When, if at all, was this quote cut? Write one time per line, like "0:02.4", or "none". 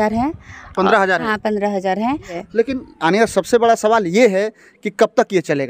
0:02.3